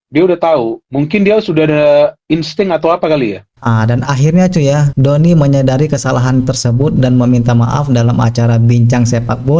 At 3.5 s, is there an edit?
yes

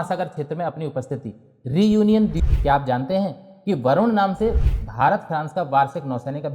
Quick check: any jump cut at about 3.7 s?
no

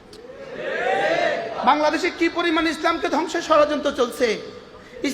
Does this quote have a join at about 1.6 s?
yes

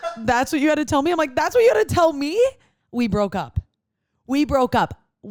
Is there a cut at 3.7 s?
no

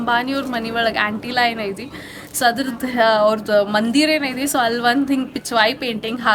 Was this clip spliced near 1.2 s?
no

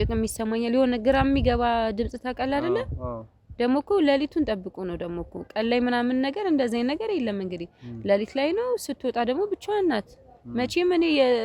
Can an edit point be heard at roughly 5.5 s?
no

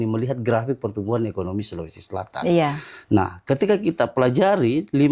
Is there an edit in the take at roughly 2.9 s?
no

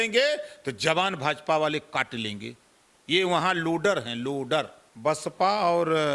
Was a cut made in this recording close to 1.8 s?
no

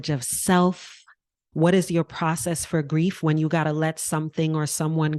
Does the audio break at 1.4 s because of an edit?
yes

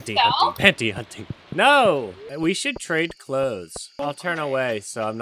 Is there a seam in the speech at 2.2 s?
yes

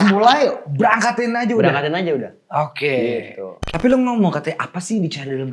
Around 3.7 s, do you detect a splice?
yes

